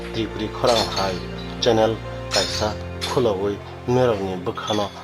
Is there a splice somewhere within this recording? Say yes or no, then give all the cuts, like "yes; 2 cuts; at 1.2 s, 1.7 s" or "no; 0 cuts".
no; 0 cuts